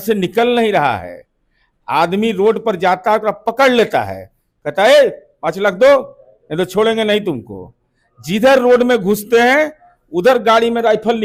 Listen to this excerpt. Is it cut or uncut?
uncut